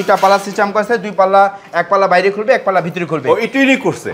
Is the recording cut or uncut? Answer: uncut